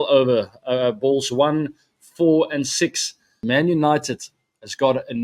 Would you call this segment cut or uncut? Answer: cut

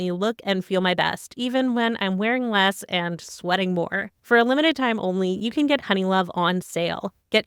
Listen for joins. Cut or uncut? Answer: uncut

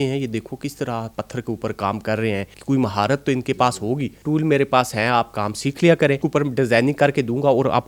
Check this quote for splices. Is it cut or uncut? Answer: cut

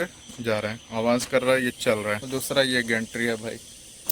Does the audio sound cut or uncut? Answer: cut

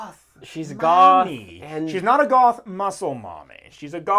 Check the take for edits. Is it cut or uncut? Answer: uncut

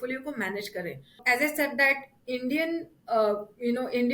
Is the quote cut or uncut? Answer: cut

